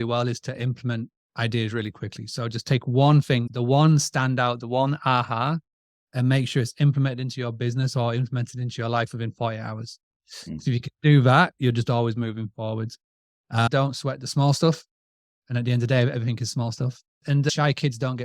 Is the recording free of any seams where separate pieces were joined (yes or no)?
no